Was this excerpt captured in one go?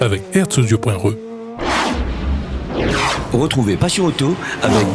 yes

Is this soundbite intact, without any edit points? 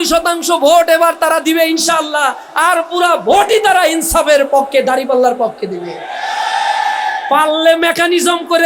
yes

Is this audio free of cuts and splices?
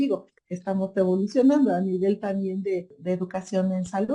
no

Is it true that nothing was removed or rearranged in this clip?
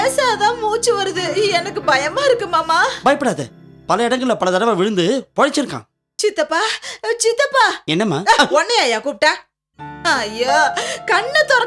yes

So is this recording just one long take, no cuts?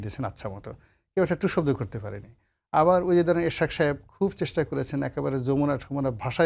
yes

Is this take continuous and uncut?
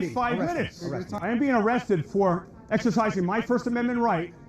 no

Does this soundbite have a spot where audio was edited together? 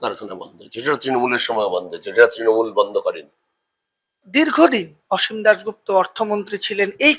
yes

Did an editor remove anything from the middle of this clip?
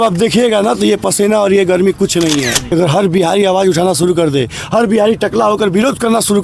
yes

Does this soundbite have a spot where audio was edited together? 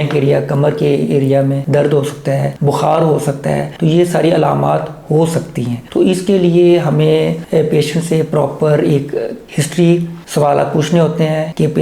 no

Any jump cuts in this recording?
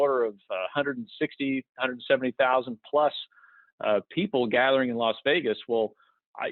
no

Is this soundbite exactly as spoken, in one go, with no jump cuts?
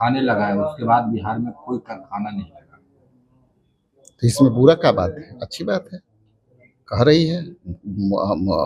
yes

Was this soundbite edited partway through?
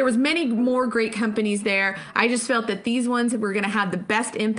no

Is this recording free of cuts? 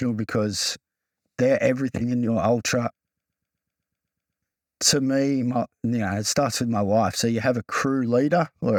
yes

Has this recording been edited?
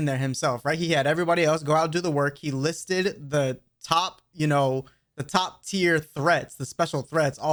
no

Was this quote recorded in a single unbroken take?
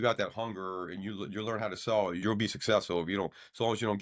no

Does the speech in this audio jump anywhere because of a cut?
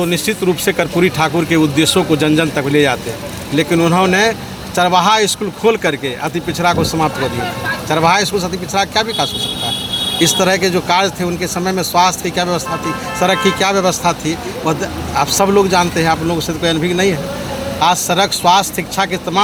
no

